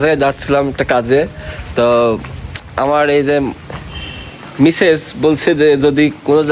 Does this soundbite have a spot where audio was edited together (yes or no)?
no